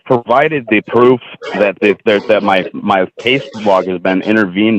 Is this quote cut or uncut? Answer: uncut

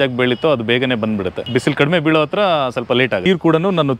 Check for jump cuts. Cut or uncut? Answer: cut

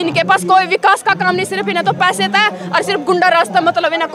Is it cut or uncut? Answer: uncut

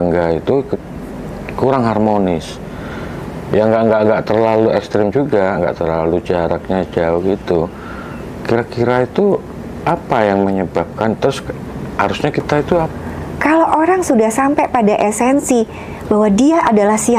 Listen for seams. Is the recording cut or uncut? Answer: cut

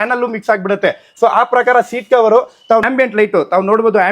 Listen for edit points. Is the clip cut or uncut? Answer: cut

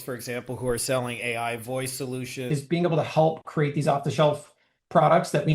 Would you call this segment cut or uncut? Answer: cut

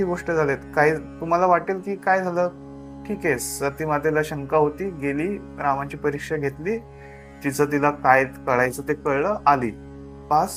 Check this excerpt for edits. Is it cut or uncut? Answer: uncut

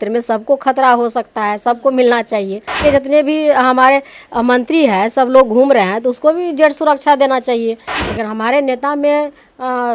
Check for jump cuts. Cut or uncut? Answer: cut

